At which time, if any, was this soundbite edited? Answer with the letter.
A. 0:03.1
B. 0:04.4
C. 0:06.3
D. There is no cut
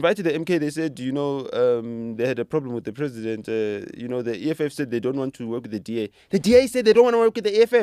D